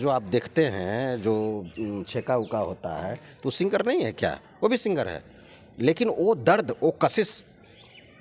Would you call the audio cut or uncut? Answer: uncut